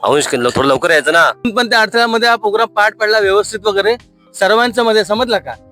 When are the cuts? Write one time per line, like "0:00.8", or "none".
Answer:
0:01.4

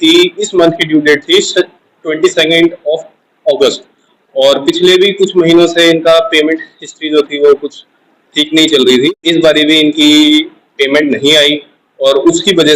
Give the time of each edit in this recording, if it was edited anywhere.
0:09.1

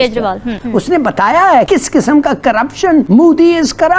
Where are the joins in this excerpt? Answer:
0:03.1

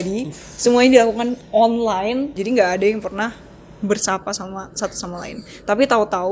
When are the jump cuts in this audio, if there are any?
0:02.3

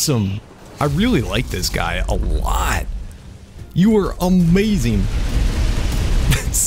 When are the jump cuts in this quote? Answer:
0:03.6

